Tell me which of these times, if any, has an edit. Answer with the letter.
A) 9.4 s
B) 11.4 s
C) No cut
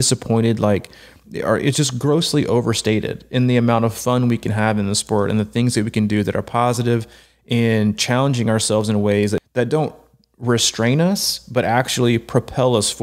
A